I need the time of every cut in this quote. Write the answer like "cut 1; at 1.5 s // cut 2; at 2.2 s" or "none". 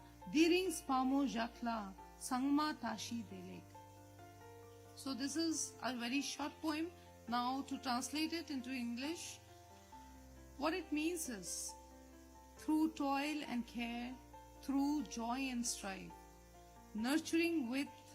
cut 1; at 3.6 s // cut 2; at 5.0 s